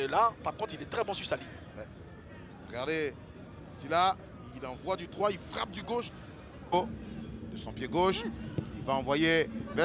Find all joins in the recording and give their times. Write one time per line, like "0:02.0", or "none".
0:06.6